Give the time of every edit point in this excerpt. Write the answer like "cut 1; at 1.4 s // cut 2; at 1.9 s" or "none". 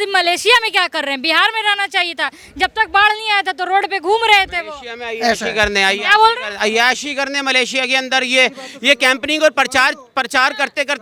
none